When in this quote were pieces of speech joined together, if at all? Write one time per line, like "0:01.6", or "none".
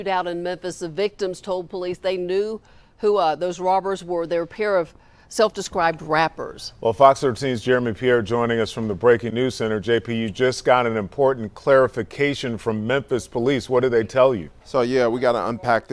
0:08.4